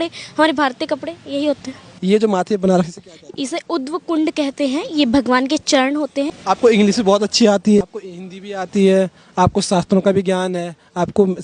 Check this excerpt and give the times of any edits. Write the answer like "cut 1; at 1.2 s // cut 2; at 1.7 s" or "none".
cut 1; at 1.9 s // cut 2; at 6.3 s // cut 3; at 7.8 s